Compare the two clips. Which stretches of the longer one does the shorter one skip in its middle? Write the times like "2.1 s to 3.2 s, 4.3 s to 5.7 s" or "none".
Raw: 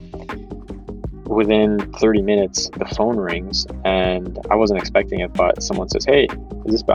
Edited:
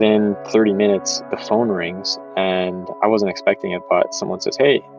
none